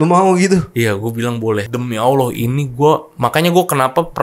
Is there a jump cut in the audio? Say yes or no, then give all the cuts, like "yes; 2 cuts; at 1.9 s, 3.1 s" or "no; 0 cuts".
yes; 1 cut; at 1.7 s